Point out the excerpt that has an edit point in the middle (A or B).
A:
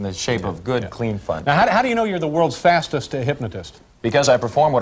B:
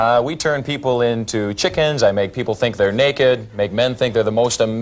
B